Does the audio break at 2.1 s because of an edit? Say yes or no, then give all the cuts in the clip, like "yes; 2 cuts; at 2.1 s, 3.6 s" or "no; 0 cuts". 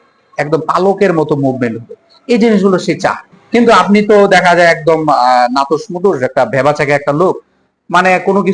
no; 1 cut; at 3.3 s